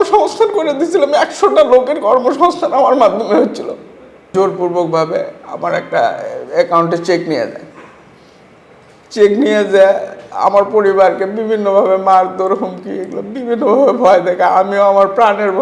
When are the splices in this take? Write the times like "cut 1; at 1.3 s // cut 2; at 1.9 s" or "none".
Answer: cut 1; at 4.3 s